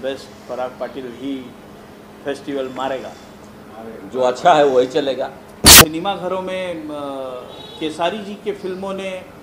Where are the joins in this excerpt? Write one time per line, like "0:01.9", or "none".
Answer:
0:05.7